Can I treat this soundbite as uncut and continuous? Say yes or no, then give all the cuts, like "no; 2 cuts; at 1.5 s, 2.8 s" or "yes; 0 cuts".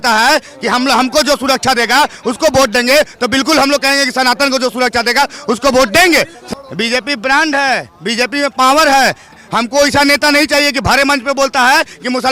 no; 2 cuts; at 6.4 s, 9.4 s